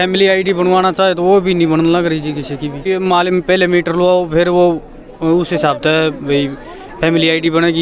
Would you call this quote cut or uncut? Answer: cut